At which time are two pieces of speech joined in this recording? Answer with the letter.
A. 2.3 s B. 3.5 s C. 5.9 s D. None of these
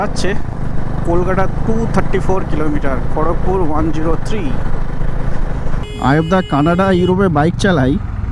C